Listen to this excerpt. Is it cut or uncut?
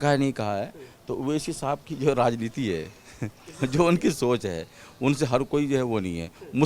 uncut